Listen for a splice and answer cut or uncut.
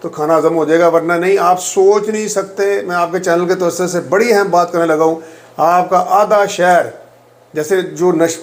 uncut